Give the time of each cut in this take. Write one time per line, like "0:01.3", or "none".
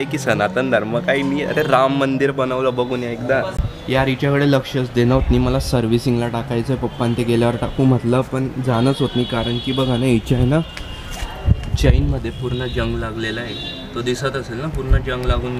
none